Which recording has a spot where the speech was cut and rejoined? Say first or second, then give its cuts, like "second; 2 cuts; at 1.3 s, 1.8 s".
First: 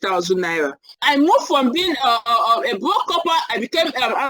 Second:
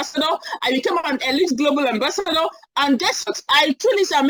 first; 1 cut; at 0.9 s